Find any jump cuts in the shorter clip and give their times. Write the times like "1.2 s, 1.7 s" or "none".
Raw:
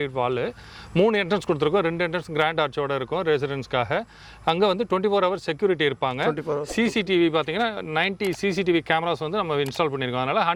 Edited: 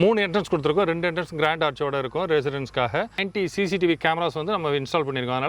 3.2 s